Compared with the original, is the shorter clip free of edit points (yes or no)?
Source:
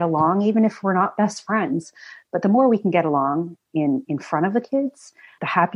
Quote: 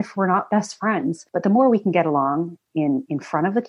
no